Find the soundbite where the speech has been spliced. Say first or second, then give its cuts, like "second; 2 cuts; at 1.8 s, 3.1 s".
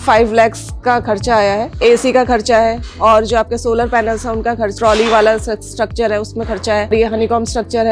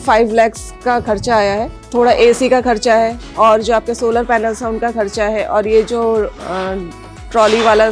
first; 3 cuts; at 1.8 s, 4.7 s, 6.9 s